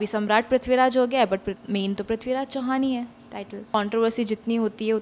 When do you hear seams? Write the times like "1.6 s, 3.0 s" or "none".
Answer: 3.7 s